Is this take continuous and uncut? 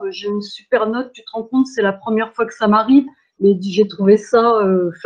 yes; 0 cuts

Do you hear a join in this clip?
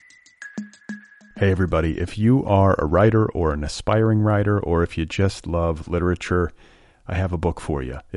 yes; 1 cut; at 0.9 s

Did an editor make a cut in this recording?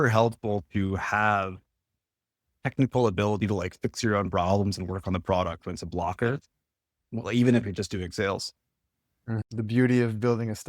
yes; 1 cut; at 9.4 s

